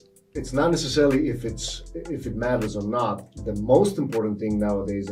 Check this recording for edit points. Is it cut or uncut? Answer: uncut